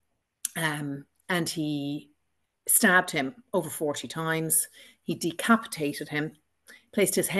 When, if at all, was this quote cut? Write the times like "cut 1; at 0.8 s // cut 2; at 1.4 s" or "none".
none